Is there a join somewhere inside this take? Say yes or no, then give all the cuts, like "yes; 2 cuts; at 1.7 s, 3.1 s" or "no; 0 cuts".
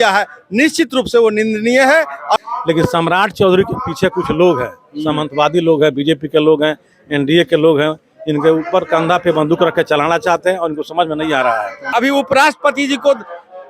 yes; 2 cuts; at 2.4 s, 11.9 s